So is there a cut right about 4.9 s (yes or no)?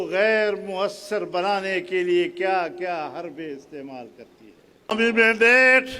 yes